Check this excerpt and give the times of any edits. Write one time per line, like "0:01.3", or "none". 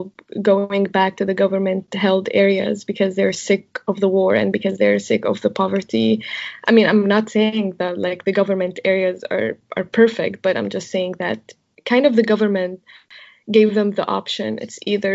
0:11.7